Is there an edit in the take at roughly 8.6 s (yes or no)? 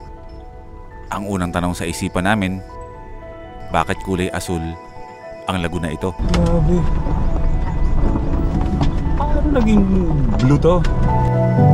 no